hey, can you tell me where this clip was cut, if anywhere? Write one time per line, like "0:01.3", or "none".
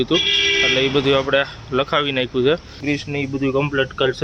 0:02.8